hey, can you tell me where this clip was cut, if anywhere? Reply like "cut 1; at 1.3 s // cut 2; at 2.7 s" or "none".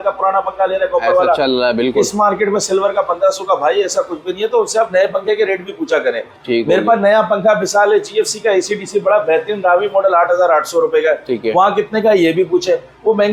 none